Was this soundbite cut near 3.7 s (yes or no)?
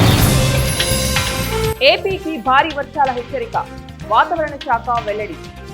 no